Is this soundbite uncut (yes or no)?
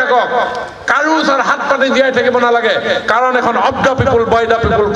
yes